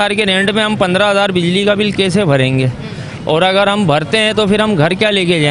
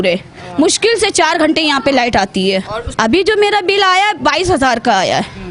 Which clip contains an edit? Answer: second; 1 cut; at 2.8 s

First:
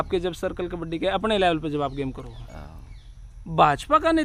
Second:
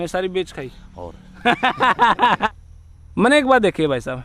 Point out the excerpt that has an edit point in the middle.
second; 1 cut; at 2.5 s

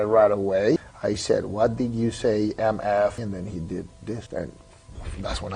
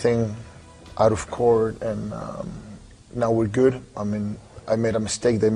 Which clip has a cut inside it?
first; 3 cuts; at 0.8 s, 3.2 s, 4.2 s

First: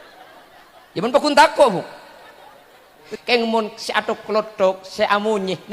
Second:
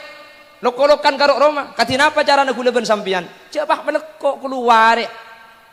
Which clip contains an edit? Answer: first; 1 cut; at 3.1 s

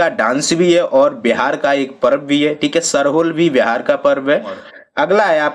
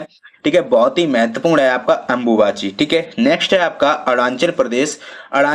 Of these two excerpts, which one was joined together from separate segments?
first; 1 cut; at 4.6 s

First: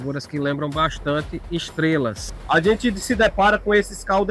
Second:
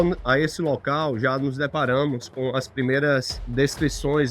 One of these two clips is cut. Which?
first; 1 cut; at 2.3 s

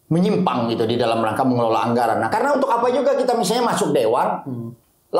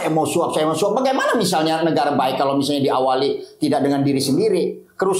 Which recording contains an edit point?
first; 1 cut; at 2.3 s

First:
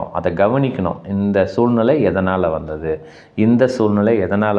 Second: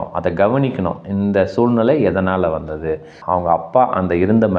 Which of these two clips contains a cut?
second; 1 cut; at 3.1 s

